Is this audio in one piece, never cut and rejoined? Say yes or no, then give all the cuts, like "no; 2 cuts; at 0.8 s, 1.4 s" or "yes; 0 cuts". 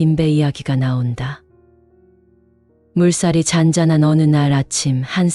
no; 2 cuts; at 1.4 s, 2.9 s